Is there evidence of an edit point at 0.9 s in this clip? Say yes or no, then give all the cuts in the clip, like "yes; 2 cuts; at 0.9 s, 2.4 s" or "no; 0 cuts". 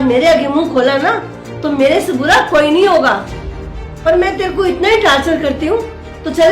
no; 0 cuts